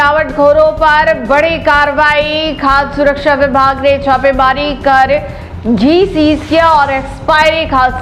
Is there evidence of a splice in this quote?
no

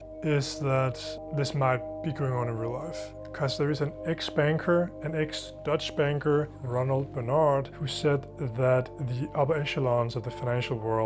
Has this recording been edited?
yes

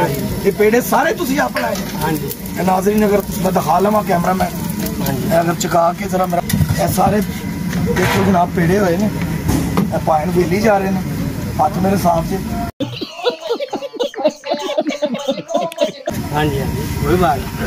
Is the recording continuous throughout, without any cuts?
yes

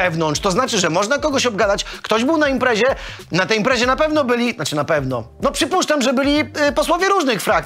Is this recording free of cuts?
yes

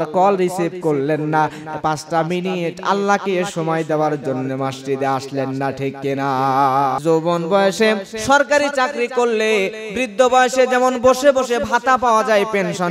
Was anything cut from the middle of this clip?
yes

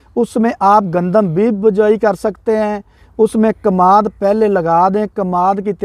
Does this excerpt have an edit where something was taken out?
no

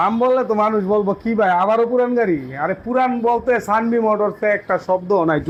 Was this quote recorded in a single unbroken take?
yes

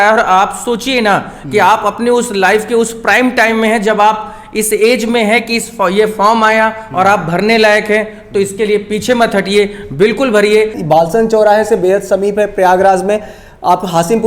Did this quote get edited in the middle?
yes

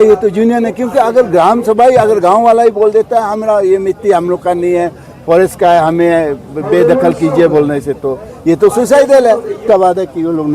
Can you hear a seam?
yes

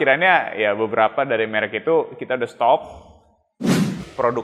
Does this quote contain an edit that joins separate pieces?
yes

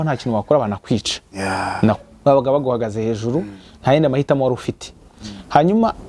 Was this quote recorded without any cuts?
no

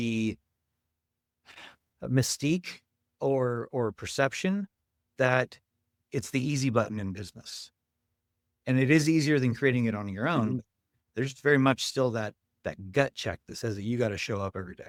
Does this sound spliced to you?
no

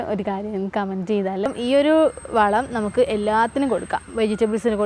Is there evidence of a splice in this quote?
yes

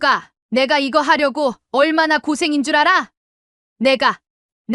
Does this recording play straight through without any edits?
no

